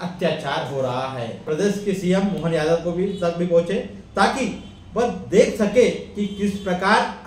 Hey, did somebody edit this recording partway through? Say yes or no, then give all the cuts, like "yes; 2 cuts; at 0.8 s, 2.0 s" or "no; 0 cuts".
yes; 1 cut; at 1.3 s